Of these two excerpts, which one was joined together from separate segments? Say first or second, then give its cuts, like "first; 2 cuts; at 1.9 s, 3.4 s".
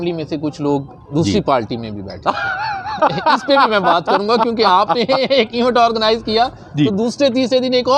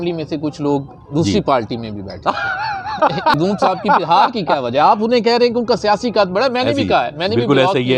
second; 1 cut; at 3.3 s